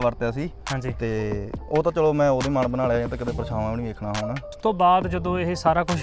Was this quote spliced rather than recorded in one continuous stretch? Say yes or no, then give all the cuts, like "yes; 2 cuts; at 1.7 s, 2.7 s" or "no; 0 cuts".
yes; 1 cut; at 4.6 s